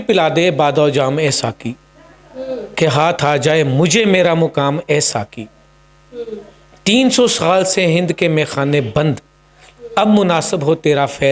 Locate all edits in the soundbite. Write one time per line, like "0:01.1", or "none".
none